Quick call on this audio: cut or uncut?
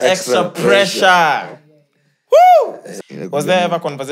cut